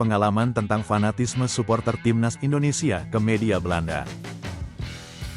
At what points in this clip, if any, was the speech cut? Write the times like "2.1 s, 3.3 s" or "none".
4.1 s